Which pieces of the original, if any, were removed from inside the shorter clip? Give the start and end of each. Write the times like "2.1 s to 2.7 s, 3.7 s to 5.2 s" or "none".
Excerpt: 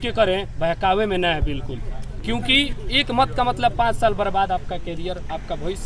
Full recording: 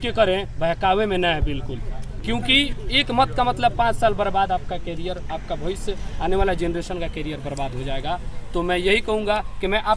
none